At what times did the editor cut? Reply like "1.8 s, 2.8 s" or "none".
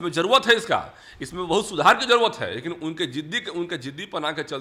none